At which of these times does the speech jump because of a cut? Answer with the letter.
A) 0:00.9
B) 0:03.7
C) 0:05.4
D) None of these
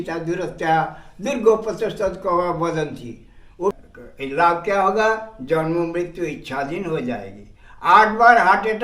B